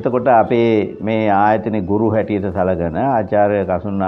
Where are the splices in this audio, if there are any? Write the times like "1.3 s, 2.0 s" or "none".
none